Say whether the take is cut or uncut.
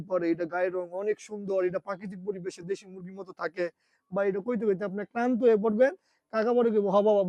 uncut